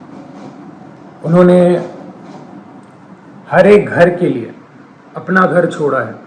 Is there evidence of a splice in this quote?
yes; 1 cut; at 1.0 s

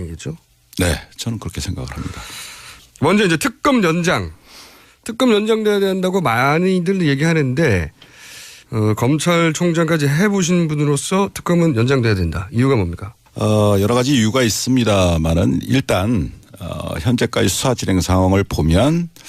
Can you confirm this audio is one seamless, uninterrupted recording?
yes; 0 cuts

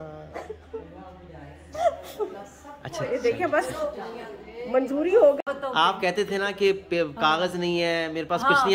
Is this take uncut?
no; 1 cut; at 5.5 s

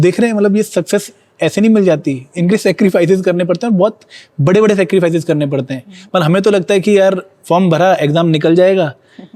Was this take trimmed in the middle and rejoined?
no; 0 cuts

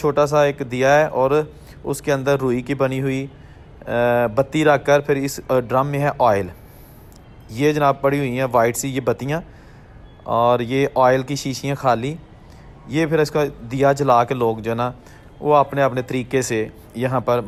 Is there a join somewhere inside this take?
no; 0 cuts

